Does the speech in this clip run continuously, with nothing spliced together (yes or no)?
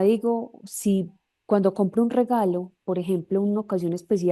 yes